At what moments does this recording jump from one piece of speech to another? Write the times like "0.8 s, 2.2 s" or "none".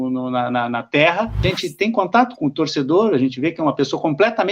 1.4 s

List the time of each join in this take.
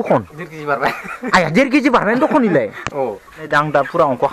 3.3 s

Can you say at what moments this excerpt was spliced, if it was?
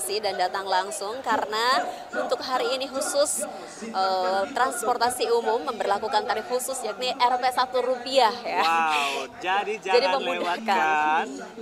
none

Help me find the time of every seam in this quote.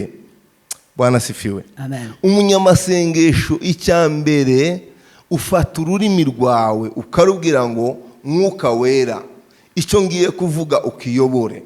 none

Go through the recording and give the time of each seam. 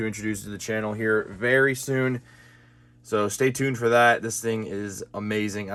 none

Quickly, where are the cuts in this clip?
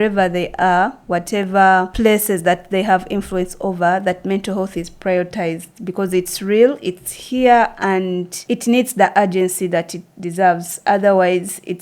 1.9 s, 8.3 s

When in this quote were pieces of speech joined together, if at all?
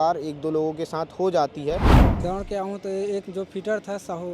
2.0 s

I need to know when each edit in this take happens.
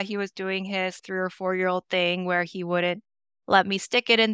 1.0 s

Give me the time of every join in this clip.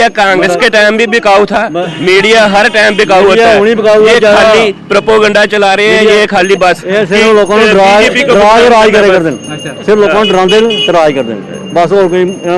none

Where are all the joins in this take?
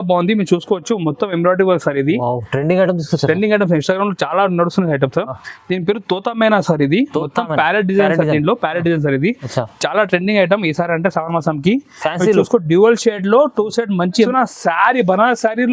14.3 s

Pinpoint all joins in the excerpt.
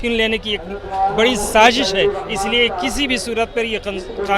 none

